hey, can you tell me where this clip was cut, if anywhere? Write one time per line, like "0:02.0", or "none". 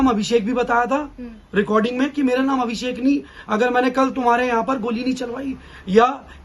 none